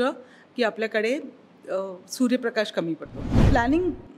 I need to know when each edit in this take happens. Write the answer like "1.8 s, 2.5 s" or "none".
3.3 s

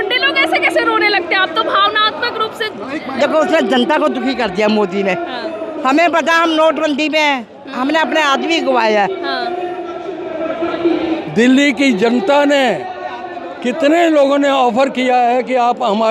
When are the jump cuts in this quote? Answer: 11.2 s

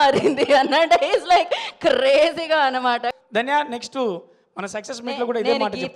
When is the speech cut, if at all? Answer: 3.2 s

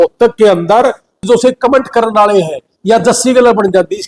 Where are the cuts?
1.2 s

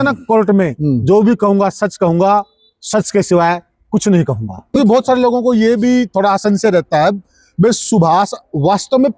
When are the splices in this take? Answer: 4.7 s

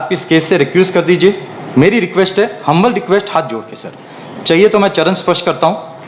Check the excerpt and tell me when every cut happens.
none

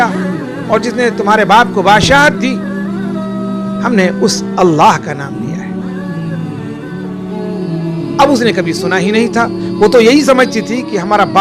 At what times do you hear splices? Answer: 2.5 s, 3.9 s

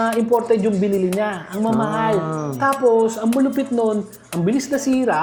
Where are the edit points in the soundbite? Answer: none

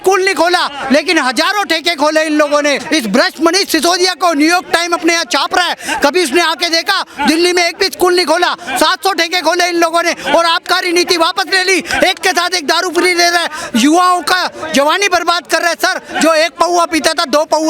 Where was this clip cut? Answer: 2.8 s

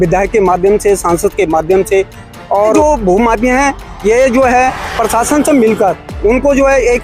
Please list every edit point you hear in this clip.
2.7 s, 6.1 s

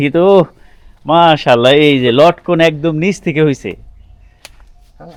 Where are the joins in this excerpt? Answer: none

